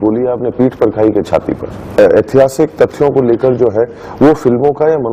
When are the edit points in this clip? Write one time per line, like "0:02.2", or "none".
0:02.0